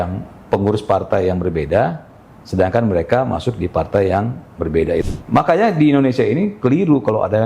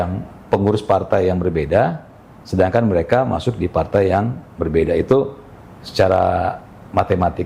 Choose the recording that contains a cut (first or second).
first